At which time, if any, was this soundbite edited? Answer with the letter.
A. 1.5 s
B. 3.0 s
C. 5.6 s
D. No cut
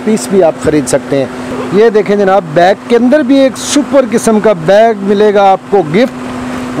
A